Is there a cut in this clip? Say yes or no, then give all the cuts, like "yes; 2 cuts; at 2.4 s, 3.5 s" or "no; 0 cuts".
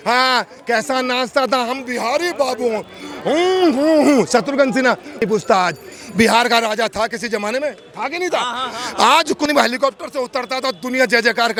no; 0 cuts